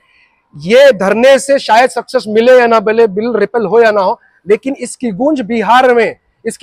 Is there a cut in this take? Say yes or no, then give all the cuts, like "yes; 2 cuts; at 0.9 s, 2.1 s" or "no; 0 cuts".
no; 0 cuts